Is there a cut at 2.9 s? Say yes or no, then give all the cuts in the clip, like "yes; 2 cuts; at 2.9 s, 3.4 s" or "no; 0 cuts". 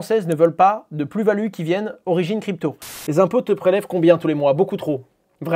yes; 1 cut; at 2.9 s